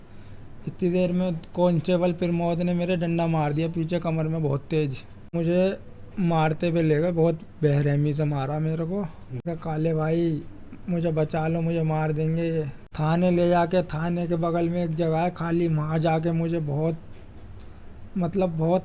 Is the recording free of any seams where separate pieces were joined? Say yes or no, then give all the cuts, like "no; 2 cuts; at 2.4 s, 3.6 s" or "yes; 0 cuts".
no; 3 cuts; at 5.3 s, 9.5 s, 12.8 s